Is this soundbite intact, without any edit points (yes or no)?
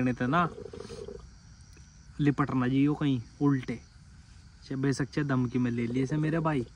yes